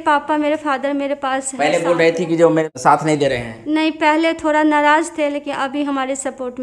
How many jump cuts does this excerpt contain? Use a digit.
1